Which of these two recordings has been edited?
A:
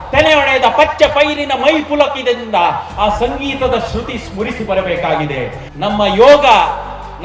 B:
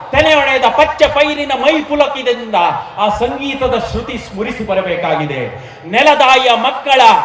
A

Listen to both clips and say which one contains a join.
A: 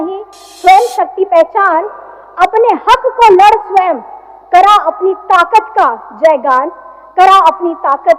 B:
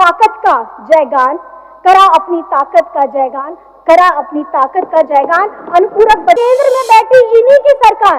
B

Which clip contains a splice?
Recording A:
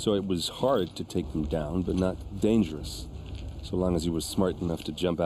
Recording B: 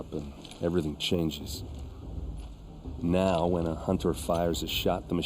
B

